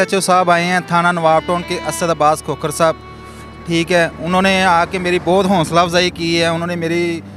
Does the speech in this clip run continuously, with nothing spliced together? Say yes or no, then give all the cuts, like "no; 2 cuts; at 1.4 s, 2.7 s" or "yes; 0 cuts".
yes; 0 cuts